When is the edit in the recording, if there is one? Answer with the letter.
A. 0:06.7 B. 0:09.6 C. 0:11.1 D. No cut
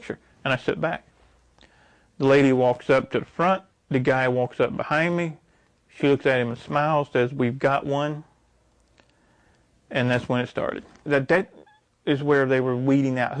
C